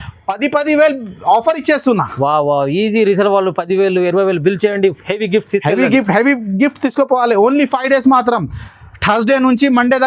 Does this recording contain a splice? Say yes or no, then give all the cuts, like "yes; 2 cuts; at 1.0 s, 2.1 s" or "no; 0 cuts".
no; 0 cuts